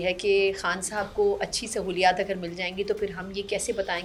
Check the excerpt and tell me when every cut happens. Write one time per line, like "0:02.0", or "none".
none